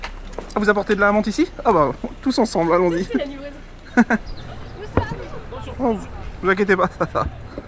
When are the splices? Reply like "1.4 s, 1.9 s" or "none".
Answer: 4.4 s